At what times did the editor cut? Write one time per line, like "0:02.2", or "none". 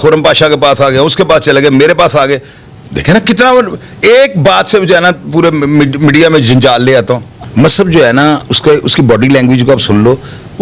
0:07.3